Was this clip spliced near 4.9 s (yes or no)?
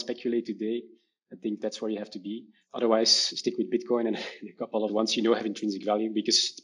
yes